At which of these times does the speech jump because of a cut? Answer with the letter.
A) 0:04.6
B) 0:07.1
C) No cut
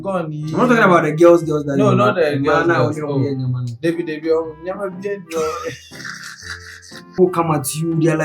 B